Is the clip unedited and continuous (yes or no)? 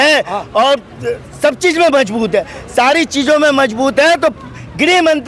yes